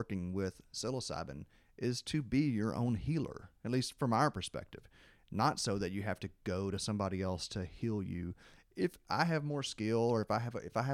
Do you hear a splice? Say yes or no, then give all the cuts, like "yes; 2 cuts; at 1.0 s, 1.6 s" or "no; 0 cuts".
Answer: no; 0 cuts